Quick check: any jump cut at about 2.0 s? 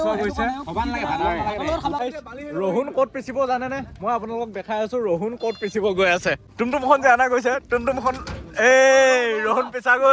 yes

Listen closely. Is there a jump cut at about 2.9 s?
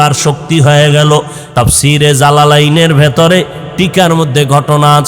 no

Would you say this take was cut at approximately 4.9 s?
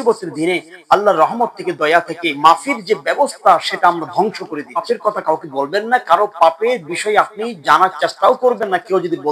yes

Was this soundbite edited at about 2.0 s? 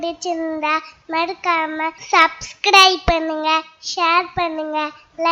yes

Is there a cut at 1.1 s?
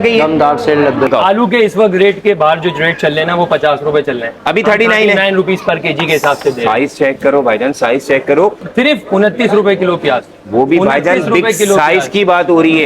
yes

